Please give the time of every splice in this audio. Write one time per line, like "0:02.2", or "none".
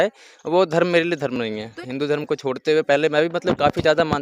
0:01.7